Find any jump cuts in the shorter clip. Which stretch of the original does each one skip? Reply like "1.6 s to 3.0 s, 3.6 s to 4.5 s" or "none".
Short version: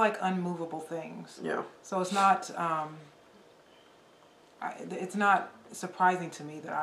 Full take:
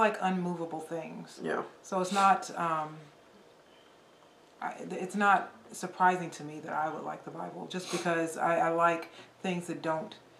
none